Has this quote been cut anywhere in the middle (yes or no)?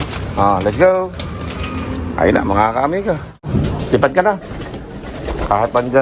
yes